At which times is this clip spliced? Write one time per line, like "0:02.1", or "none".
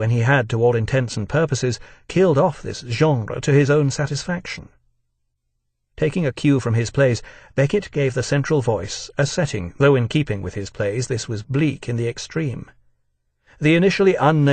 0:08.1